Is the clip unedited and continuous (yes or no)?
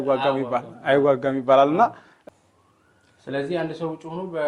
no